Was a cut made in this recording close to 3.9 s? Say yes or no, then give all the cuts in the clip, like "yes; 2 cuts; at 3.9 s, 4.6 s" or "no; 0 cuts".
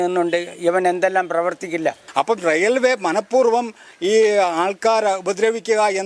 no; 1 cut; at 2.0 s